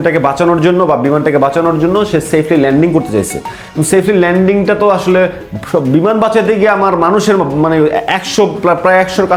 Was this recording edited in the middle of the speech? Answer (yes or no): no